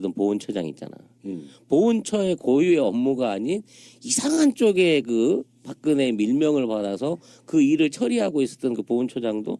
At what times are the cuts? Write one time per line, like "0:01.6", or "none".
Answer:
none